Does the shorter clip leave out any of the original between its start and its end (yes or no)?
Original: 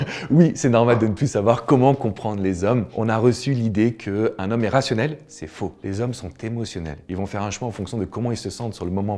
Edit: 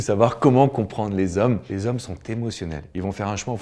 yes